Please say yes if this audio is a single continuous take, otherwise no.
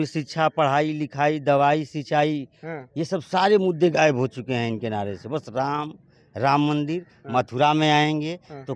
yes